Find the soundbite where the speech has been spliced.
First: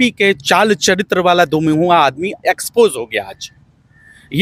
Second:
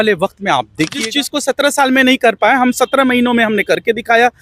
second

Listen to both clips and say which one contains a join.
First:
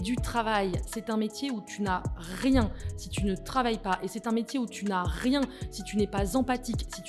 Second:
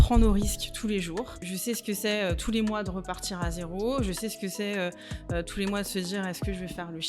second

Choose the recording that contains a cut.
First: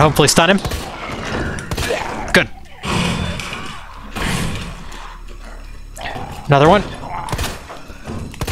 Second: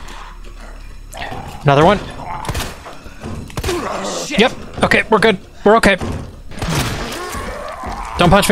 second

